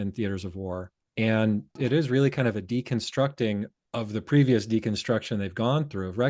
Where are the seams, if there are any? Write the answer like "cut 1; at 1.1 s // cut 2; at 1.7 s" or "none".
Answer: cut 1; at 1.0 s // cut 2; at 1.8 s // cut 3; at 3.8 s